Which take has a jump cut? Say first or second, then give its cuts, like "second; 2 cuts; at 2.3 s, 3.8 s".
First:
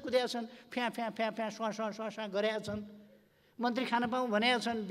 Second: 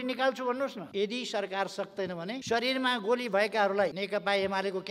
second; 3 cuts; at 0.8 s, 2.4 s, 4.0 s